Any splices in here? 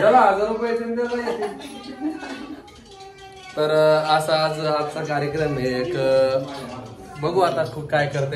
no; 0 cuts

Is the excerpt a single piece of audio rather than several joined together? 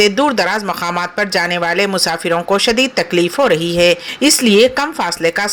no; 1 cut; at 4.1 s

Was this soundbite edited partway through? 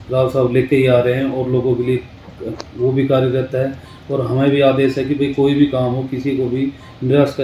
no; 0 cuts

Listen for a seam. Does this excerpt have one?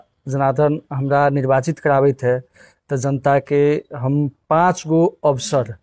no; 0 cuts

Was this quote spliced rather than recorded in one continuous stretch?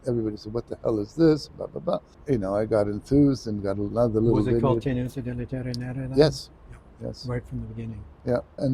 no; 0 cuts

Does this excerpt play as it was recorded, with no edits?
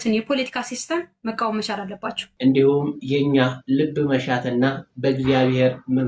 no; 1 cut; at 2.2 s

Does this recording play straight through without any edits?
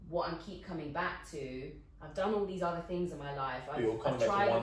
yes; 0 cuts

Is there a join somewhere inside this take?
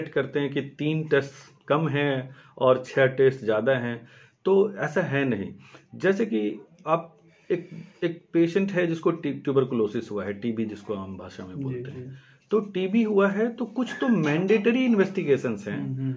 no; 0 cuts

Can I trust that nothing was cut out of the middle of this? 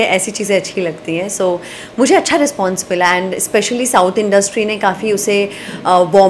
yes; 0 cuts

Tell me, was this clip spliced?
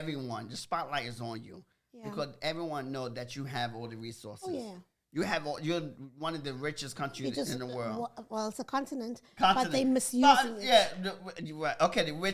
no; 0 cuts

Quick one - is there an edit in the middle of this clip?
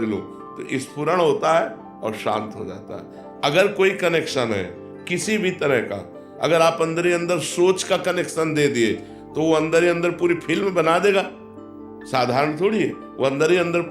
no; 0 cuts

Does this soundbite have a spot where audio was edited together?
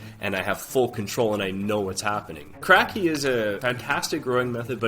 yes; 2 cuts; at 2.6 s, 3.6 s

